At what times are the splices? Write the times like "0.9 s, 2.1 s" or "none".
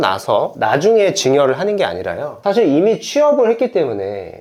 none